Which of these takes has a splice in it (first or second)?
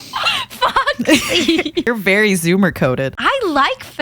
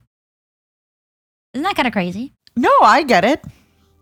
first